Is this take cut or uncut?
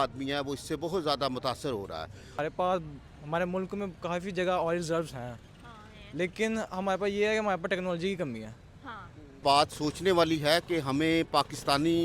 cut